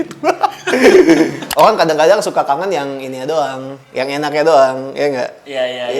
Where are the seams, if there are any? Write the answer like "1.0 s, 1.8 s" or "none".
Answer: 1.4 s